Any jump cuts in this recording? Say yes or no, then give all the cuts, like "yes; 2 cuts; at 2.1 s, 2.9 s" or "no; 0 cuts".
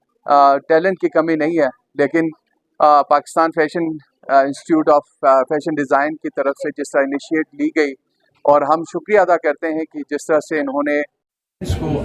no; 0 cuts